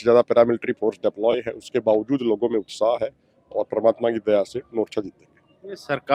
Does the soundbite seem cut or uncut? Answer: uncut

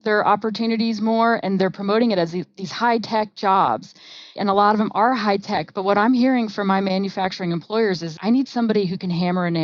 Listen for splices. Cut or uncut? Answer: cut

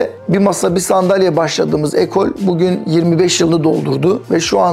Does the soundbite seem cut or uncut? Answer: uncut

